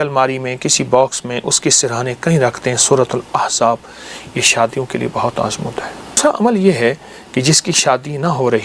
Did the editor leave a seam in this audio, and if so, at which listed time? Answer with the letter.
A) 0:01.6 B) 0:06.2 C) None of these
B